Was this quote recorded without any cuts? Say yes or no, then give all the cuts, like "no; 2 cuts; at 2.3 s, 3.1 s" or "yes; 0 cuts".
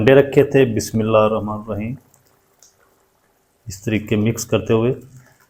yes; 0 cuts